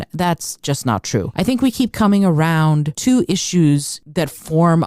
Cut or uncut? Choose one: cut